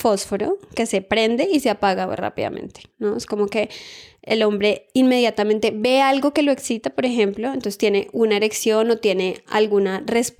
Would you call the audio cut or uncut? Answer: uncut